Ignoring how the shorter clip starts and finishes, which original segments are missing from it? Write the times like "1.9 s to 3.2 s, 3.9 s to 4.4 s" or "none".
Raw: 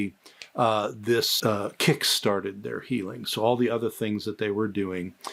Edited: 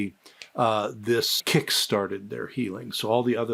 1.3 s to 1.7 s